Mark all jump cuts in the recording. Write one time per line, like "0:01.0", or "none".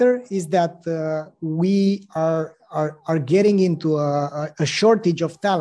none